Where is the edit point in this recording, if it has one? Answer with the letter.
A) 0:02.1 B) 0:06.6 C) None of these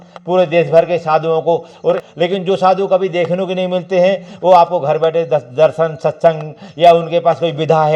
A